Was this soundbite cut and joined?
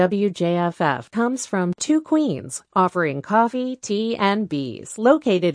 no; 0 cuts

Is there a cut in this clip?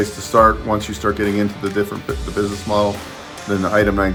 no; 0 cuts

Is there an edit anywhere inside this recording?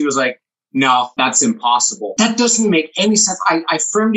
yes; 2 cuts; at 1.1 s, 2.1 s

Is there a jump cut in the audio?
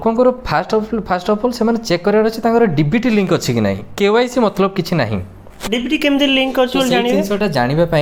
no; 0 cuts

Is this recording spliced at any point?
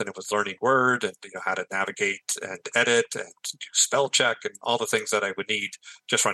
no; 0 cuts

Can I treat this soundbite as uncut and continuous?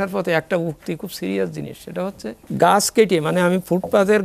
no; 1 cut; at 2.4 s

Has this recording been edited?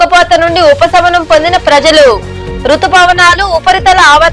no; 0 cuts

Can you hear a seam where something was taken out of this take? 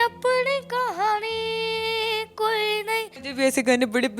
yes; 1 cut; at 3.2 s

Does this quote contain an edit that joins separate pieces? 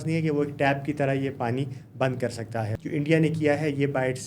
yes; 1 cut; at 2.8 s

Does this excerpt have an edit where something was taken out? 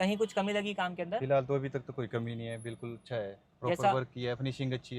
no; 0 cuts

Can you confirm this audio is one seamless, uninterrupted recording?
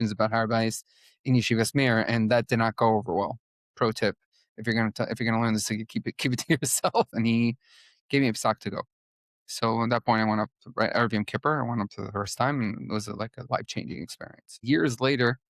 no; 2 cuts; at 7.1 s, 14.6 s

